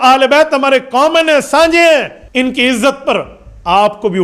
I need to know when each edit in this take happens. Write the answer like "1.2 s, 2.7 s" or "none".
2.2 s